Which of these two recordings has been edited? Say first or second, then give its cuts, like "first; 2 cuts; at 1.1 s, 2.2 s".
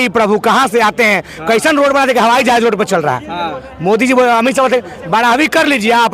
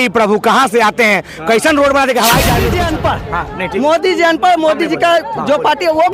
second; 1 cut; at 2.7 s